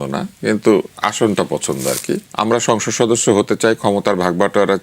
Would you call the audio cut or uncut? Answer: cut